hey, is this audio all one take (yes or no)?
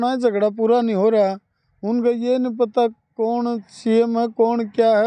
yes